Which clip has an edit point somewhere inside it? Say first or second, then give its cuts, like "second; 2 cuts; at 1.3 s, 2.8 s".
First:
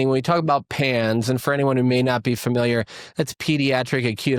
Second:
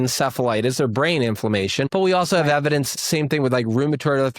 second; 2 cuts; at 1.9 s, 2.9 s